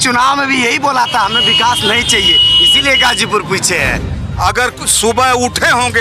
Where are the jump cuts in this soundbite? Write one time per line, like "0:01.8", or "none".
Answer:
0:04.0